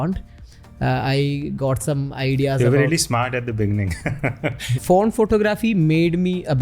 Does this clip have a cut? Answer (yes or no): yes